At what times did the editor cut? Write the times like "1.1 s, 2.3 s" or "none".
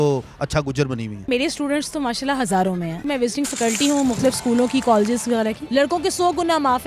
1.3 s, 3.0 s, 5.6 s